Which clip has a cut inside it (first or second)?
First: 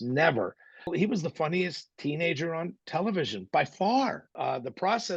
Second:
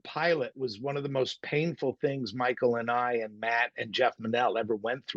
first